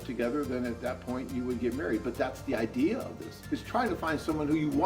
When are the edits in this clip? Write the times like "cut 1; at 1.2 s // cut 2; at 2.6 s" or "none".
cut 1; at 3.3 s